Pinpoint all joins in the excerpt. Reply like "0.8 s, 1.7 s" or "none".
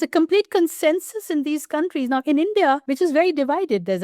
2.9 s